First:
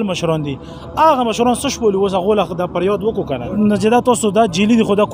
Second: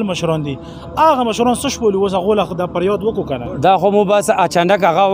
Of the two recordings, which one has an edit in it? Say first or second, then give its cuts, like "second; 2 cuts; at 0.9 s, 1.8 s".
first; 1 cut; at 3.5 s